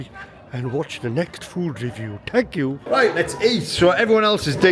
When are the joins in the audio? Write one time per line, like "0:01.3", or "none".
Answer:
0:02.8